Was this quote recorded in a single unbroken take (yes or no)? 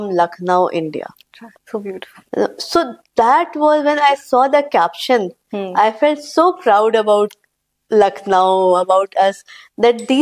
yes